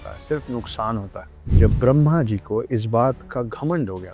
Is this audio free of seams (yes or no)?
no